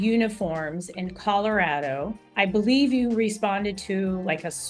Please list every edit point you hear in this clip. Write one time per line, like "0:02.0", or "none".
0:02.2